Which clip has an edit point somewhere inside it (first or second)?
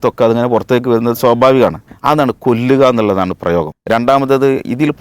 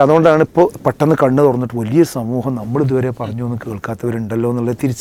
first